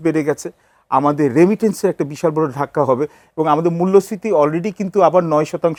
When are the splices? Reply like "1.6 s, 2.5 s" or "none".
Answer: none